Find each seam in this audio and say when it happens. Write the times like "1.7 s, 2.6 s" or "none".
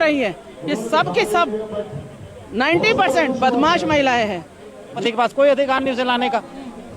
5.0 s